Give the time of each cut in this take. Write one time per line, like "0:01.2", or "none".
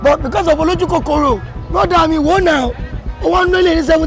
0:01.6

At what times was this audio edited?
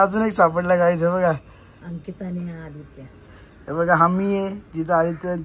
none

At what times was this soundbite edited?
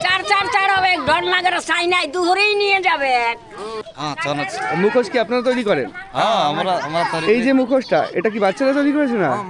0:03.9

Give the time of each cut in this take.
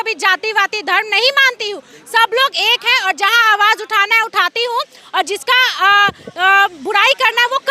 none

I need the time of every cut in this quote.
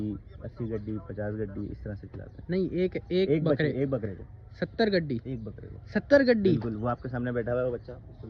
none

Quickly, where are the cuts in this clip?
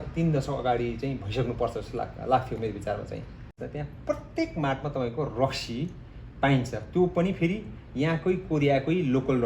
0:03.6

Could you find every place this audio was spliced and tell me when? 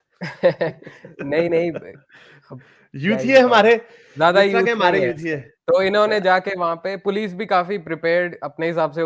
none

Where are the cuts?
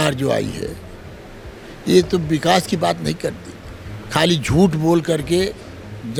none

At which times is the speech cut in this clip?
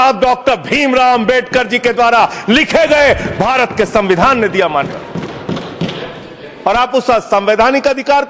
none

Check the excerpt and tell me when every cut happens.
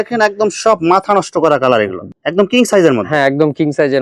none

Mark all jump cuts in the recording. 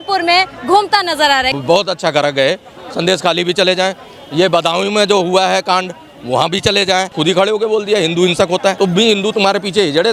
0:01.5
0:07.1
0:08.8

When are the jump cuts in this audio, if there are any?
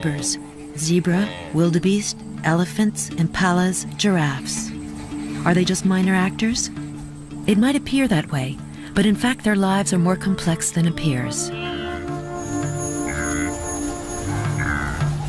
0:01.2

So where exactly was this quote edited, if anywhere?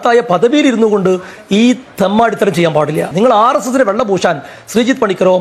none

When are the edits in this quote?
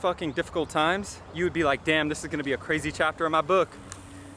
none

